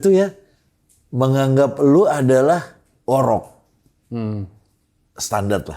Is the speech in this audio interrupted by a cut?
no; 0 cuts

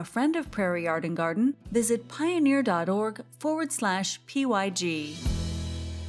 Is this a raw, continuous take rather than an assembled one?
no; 1 cut; at 5.2 s

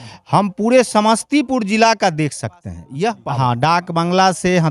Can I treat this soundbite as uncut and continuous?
no; 1 cut; at 3.2 s

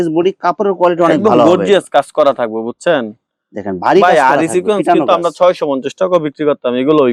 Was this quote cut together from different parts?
no; 0 cuts

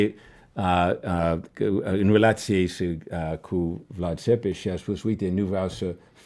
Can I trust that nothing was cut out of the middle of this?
yes; 0 cuts

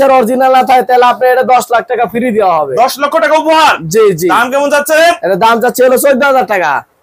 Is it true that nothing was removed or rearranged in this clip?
yes; 0 cuts

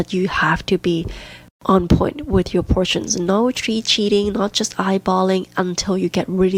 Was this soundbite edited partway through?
no; 0 cuts

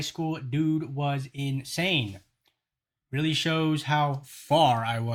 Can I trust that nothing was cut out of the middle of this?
yes; 0 cuts

